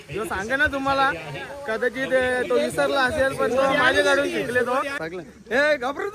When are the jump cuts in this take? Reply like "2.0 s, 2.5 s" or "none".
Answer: 5.0 s